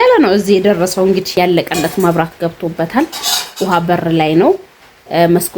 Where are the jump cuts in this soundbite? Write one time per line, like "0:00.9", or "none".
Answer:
0:01.3